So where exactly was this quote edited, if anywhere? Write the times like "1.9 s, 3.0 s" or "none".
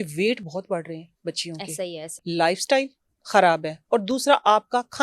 2.1 s